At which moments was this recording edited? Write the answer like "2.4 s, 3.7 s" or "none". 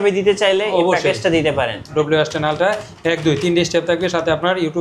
1.9 s